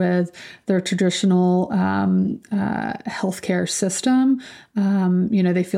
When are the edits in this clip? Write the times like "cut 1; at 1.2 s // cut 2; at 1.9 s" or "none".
none